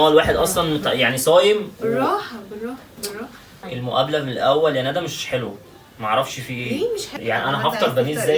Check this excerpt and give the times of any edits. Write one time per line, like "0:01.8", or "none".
0:03.6
0:07.1